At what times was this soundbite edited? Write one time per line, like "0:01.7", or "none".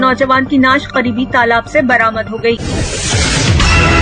0:02.6